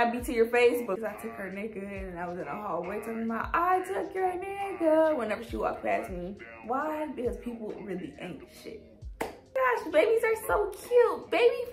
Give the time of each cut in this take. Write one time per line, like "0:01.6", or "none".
0:01.0
0:06.6
0:09.5